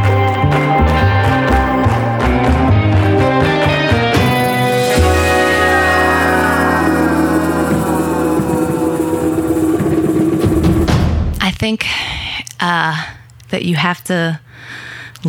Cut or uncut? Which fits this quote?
cut